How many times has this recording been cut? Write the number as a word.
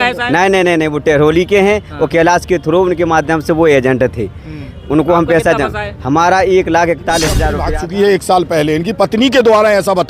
one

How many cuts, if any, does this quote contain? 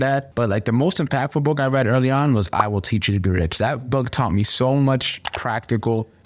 zero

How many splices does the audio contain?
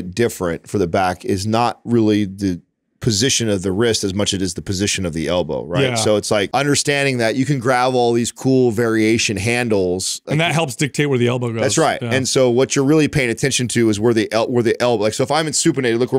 two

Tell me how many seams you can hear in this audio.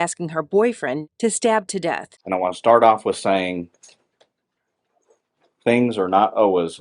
two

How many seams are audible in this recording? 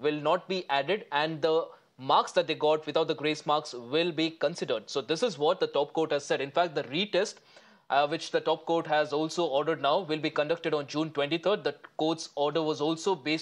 one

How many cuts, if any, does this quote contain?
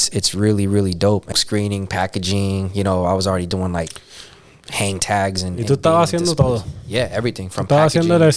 one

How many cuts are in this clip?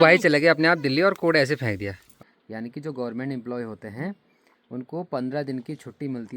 one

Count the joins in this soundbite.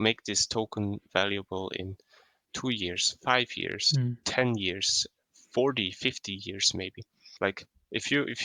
two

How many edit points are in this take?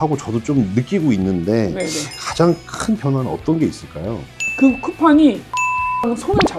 one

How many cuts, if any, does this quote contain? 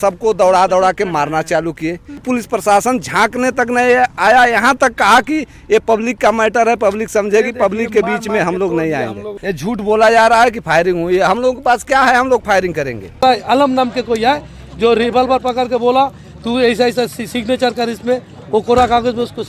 three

